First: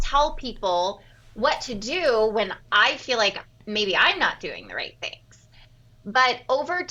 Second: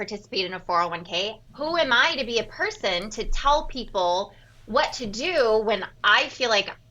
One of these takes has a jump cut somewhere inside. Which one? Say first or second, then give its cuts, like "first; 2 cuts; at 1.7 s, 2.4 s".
second; 1 cut; at 1.4 s